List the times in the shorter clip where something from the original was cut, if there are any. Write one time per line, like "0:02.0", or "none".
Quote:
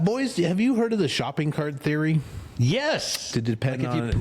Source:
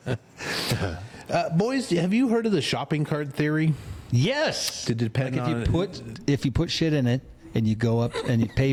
none

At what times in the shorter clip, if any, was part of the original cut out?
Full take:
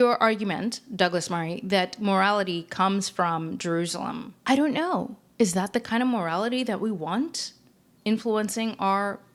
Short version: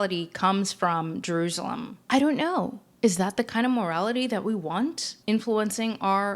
0:05.1

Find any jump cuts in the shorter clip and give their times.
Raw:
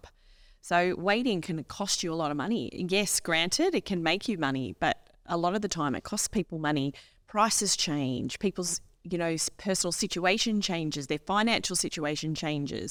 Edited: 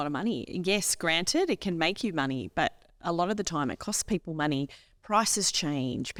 none

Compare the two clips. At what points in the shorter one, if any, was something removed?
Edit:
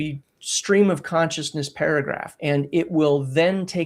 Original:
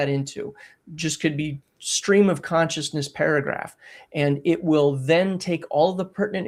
0:02.3

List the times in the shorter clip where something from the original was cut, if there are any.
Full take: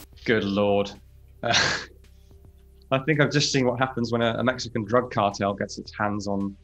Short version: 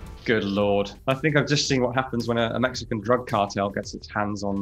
0:01.0

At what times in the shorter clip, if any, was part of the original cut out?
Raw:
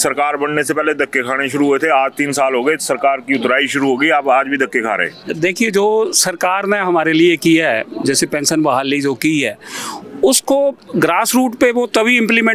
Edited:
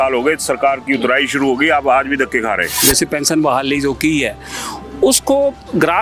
0:02.7

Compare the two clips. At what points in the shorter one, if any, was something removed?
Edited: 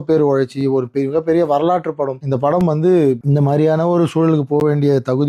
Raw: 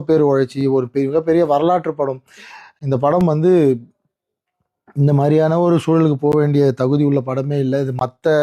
0:02.2
0:03.2

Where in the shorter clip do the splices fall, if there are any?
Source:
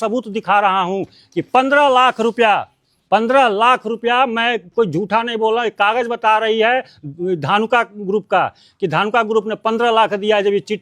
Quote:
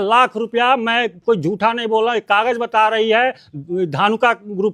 none

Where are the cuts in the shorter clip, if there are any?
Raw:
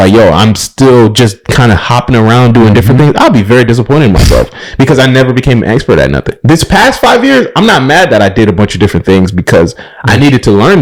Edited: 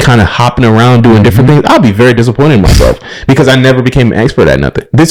none

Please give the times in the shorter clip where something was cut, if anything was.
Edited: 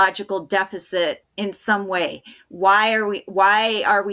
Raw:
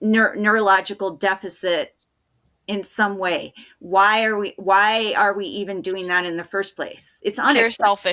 0:01.3

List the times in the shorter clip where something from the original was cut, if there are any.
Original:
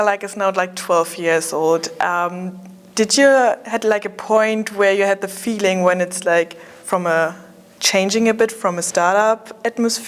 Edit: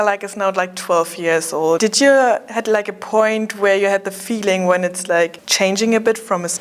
0:01.8
0:05.4

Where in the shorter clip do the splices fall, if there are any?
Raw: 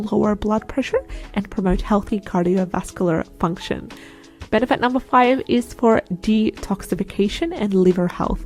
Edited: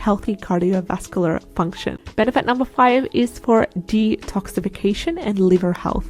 0:02.0

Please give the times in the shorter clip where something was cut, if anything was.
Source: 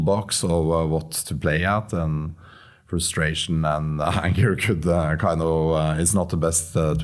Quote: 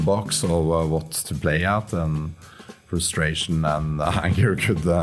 none

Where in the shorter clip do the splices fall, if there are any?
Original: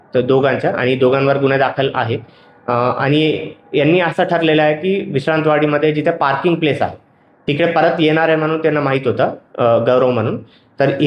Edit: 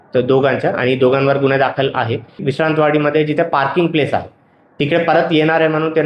0:02.4

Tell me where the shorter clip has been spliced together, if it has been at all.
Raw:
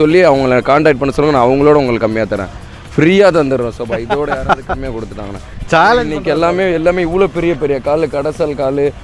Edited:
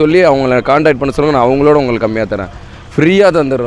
none

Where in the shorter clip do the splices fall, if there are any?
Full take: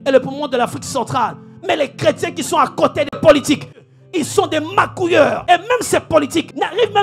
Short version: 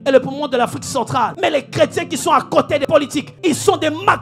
0:01.3
0:02.9

